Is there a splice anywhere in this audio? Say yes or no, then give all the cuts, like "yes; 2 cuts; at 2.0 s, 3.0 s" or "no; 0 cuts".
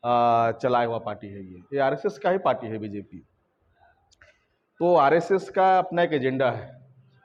no; 0 cuts